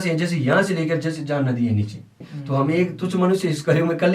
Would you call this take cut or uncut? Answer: cut